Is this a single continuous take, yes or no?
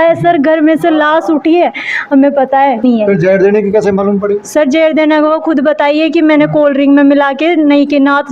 no